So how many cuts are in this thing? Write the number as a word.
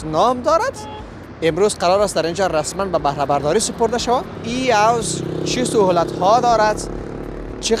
one